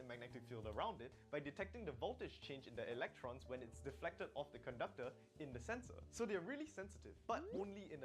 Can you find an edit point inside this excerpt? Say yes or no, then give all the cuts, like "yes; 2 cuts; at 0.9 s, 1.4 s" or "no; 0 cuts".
yes; 1 cut; at 6.5 s